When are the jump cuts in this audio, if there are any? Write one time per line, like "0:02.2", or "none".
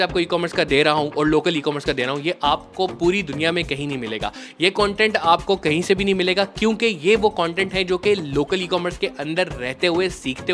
none